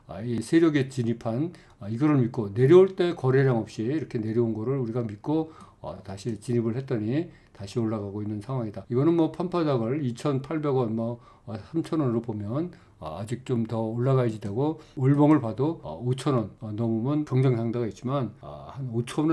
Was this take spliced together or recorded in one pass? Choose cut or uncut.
cut